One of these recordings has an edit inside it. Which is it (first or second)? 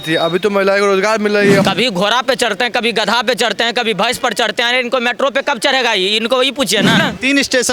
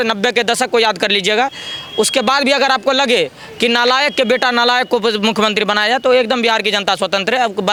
first